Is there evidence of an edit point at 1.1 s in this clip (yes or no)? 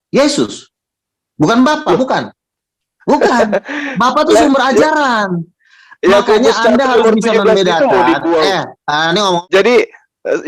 no